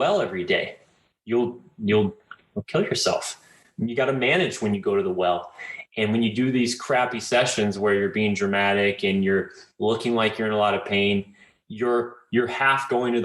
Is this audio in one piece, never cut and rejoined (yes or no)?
yes